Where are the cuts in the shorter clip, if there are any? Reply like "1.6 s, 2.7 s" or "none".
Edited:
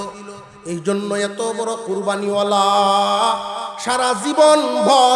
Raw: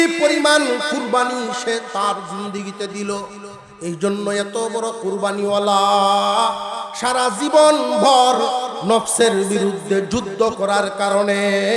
none